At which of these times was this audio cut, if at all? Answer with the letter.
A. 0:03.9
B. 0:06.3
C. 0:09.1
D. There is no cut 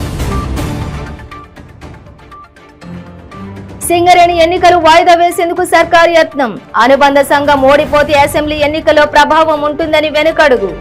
A